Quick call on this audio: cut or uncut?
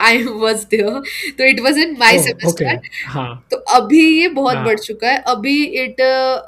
uncut